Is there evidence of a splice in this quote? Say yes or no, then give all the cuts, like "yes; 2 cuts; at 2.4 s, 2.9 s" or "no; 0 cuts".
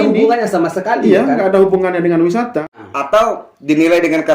yes; 1 cut; at 2.8 s